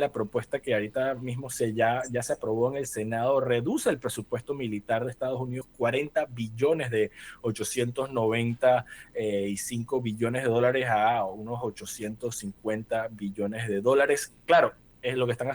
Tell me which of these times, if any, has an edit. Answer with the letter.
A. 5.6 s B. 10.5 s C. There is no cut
A